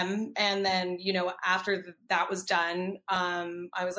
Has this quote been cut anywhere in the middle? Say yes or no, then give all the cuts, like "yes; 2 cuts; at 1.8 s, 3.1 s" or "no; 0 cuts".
no; 0 cuts